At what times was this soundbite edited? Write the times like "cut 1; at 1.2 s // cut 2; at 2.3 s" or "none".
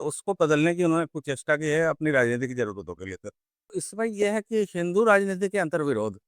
cut 1; at 3.8 s